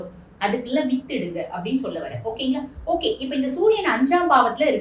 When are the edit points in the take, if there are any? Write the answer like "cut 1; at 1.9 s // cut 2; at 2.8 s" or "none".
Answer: none